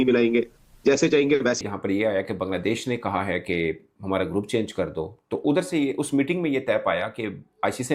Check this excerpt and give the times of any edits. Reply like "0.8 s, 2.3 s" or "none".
1.6 s